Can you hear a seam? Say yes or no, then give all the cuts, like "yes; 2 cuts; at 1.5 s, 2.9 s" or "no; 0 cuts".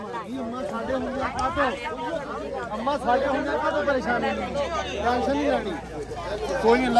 no; 0 cuts